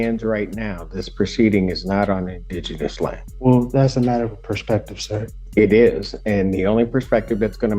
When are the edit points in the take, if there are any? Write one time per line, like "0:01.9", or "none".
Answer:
0:03.3
0:05.4